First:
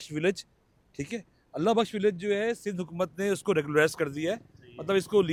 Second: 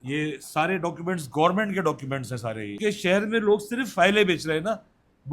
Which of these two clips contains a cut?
second; 1 cut; at 2.7 s

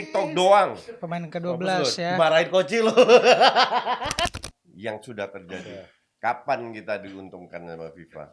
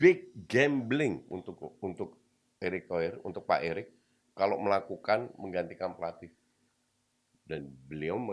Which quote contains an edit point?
first; 1 cut; at 4.3 s

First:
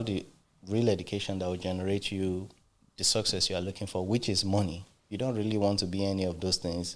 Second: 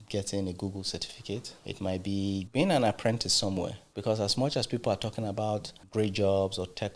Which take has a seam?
second; 4 cuts; at 1.6 s, 2.5 s, 3.8 s, 5.8 s

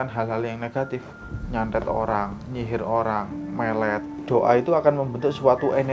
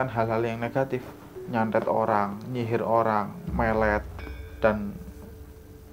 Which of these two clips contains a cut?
first; 1 cut; at 4.1 s

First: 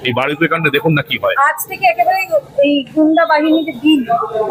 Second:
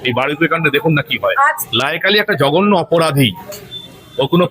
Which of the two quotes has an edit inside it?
second; 1 cut; at 1.6 s

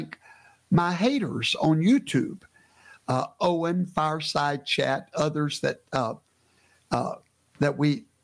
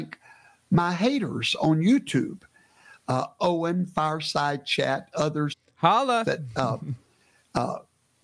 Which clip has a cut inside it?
first; 1 cut; at 5.6 s

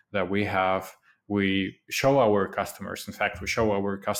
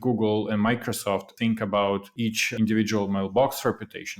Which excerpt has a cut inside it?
second; 2 cuts; at 1.3 s, 2.4 s

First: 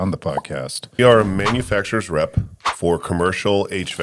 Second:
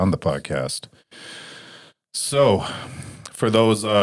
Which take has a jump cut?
first; 1 cut; at 1.0 s

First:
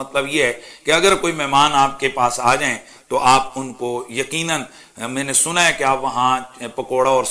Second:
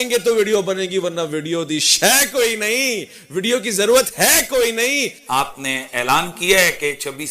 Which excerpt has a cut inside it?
second; 1 cut; at 5.2 s

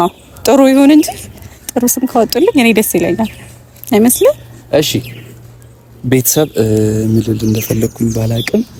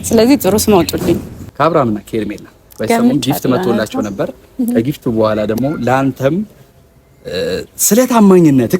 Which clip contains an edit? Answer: second; 1 cut; at 1.3 s

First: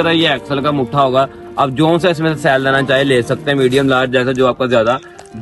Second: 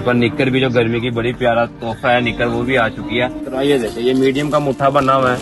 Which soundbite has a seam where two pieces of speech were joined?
second; 1 cut; at 3.4 s

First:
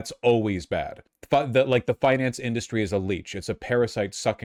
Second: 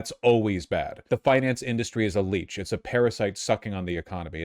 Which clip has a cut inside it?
second; 1 cut; at 1.1 s

